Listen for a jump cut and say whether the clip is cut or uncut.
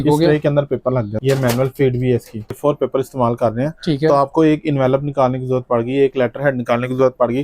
cut